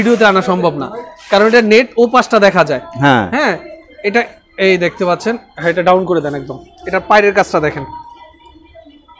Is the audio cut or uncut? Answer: uncut